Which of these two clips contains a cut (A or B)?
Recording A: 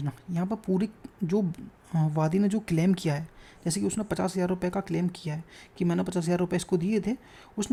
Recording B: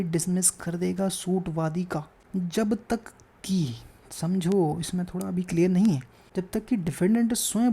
B